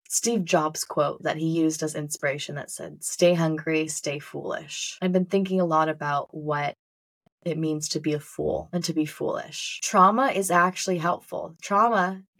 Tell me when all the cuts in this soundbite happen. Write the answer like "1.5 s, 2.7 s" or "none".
1.2 s, 9.8 s